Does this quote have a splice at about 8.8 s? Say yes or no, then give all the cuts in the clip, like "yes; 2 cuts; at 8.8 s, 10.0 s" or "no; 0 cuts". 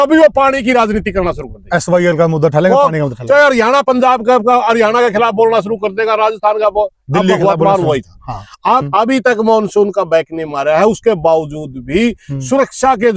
yes; 1 cut; at 8.8 s